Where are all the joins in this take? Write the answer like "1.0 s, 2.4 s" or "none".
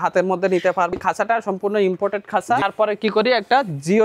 0.9 s, 2.6 s